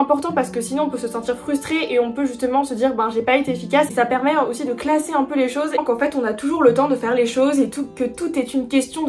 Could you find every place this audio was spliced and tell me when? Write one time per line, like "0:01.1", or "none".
0:03.9
0:05.8